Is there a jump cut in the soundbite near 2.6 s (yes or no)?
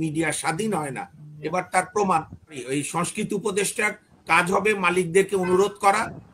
yes